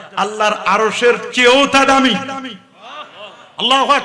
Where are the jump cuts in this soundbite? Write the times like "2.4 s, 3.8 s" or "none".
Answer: none